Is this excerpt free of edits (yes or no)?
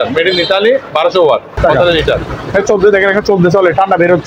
no